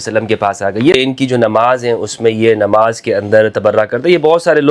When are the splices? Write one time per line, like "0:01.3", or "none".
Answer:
0:00.9